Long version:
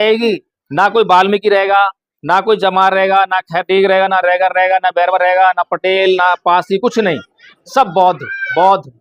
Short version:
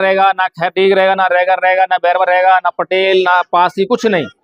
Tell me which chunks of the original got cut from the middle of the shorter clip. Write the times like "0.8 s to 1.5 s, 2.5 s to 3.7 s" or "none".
none